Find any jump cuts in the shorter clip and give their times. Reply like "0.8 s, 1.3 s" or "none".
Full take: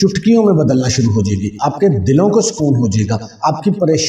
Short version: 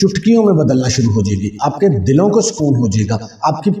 none